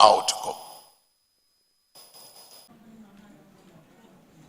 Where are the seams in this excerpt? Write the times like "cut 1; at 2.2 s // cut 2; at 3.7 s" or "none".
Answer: cut 1; at 2.7 s